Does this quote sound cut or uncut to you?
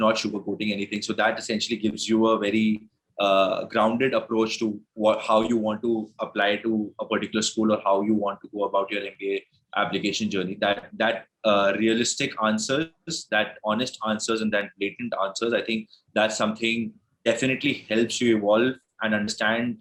uncut